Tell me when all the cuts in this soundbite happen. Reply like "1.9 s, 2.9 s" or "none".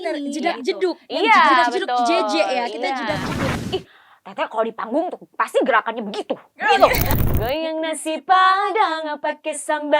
3.5 s, 7.1 s